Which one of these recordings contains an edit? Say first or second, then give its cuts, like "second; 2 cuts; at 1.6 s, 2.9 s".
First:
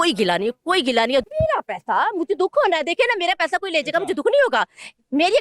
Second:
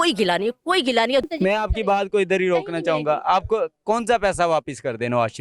first; 1 cut; at 1.3 s